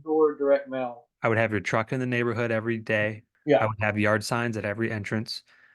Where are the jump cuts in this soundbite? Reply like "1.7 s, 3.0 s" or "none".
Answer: 1.1 s, 3.3 s